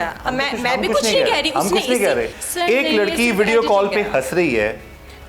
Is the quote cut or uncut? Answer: cut